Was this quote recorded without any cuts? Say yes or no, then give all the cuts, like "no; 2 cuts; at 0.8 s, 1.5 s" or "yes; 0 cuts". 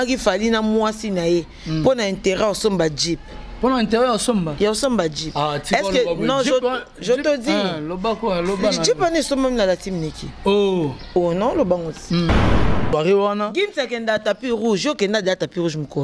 no; 1 cut; at 12.4 s